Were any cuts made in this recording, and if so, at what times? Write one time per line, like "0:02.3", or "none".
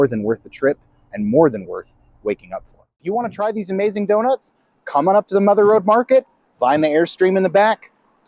0:03.0